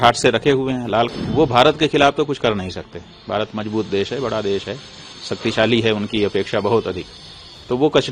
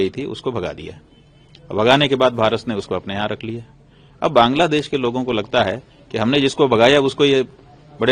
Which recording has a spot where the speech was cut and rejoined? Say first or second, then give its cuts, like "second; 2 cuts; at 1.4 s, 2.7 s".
first; 1 cut; at 1.1 s